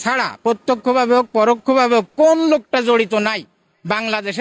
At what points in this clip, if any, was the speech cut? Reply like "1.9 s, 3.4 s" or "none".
none